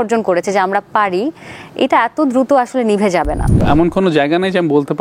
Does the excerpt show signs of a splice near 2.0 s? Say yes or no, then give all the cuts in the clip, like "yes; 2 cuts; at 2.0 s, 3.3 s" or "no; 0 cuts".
no; 1 cut; at 3.6 s